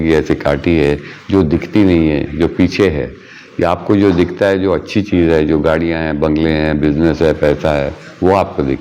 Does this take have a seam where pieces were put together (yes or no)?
no